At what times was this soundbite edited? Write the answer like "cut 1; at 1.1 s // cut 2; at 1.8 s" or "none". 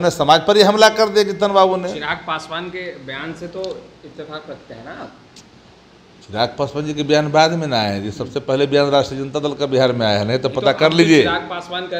none